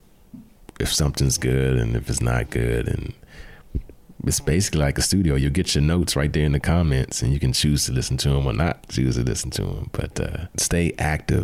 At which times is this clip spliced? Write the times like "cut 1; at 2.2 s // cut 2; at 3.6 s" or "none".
cut 1; at 10.5 s